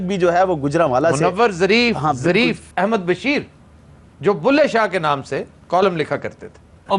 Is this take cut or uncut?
cut